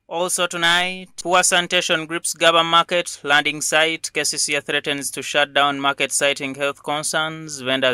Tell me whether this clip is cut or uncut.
uncut